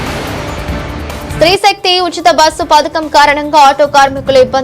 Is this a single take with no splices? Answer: yes; 0 cuts

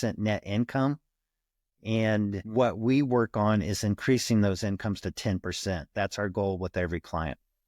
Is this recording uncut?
no; 1 cut; at 2.4 s

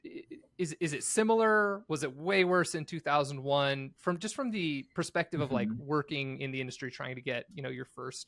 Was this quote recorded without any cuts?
yes; 0 cuts

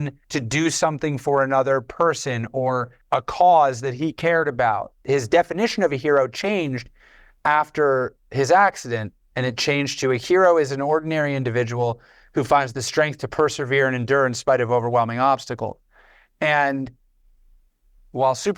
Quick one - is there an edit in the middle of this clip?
yes; 1 cut; at 4.9 s

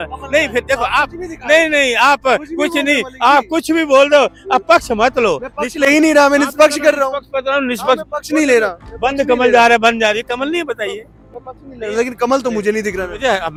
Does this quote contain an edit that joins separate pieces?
no; 0 cuts

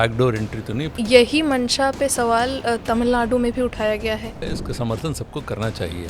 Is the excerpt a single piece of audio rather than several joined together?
no; 2 cuts; at 0.9 s, 4.4 s

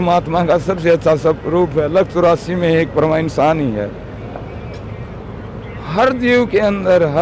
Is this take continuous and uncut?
yes; 0 cuts

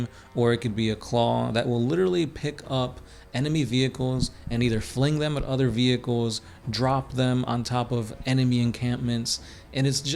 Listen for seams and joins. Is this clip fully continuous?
yes; 0 cuts

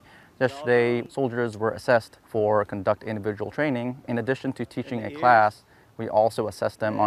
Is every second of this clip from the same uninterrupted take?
no; 3 cuts; at 1.0 s, 2.2 s, 4.1 s

